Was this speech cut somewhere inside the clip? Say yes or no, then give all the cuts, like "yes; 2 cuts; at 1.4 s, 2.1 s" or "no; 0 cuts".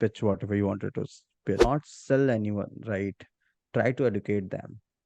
yes; 1 cut; at 1.7 s